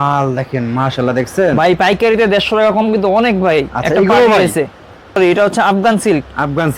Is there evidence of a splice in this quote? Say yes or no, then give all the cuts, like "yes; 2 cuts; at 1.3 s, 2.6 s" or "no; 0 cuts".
yes; 1 cut; at 5.1 s